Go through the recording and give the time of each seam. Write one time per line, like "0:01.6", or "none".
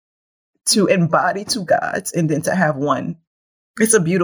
none